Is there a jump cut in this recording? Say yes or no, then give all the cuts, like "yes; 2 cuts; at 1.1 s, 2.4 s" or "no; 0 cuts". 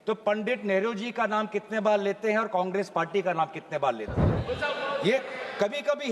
yes; 1 cut; at 4.3 s